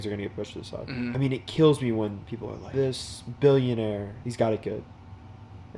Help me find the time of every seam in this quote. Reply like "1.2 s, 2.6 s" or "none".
1.1 s, 2.7 s, 4.2 s